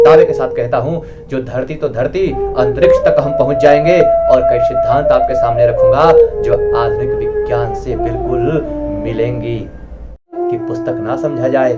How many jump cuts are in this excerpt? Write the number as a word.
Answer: one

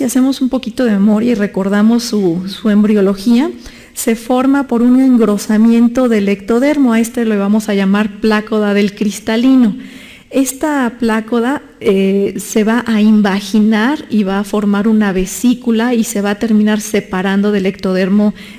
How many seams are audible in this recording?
zero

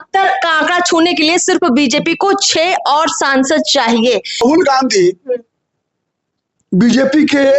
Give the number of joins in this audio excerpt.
one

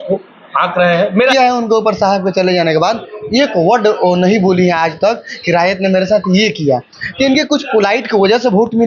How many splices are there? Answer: one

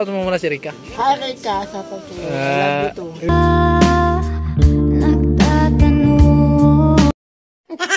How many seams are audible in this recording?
two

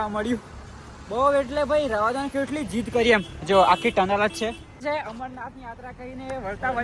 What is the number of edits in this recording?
one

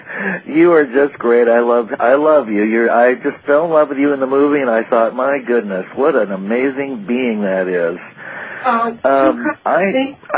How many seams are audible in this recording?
zero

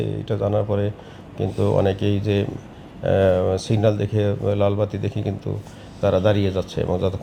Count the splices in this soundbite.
zero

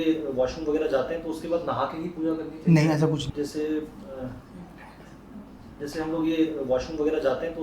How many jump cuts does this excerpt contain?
one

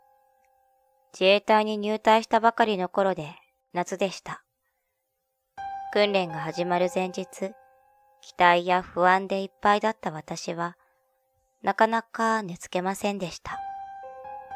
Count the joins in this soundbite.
one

